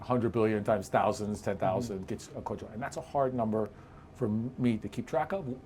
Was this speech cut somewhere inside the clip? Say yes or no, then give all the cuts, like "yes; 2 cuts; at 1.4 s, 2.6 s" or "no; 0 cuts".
no; 0 cuts